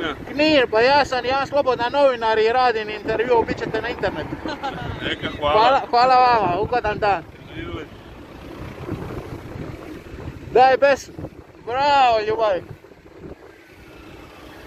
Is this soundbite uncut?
yes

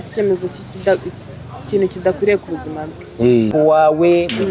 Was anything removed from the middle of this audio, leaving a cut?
yes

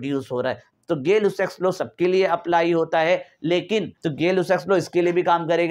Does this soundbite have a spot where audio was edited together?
yes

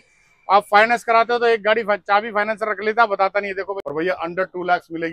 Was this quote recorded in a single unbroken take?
no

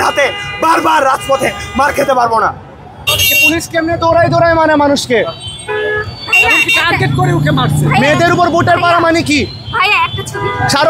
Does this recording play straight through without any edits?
no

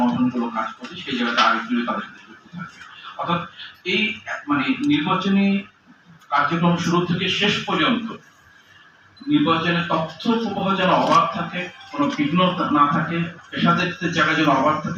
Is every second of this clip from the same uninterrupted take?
yes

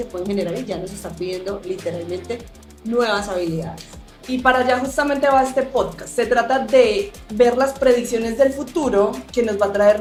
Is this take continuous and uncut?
yes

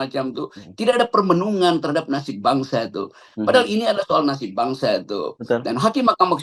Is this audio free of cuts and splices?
yes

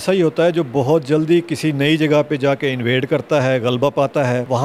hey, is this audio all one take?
yes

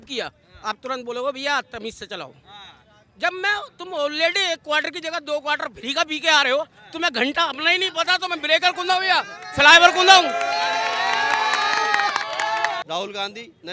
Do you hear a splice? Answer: yes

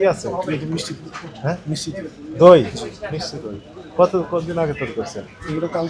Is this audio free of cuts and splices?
yes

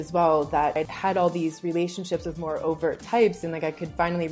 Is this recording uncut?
no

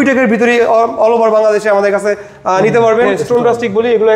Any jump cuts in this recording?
yes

